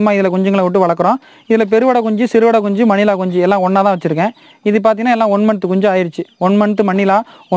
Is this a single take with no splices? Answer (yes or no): yes